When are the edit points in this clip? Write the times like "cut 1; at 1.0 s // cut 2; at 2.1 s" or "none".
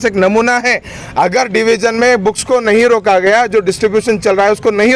none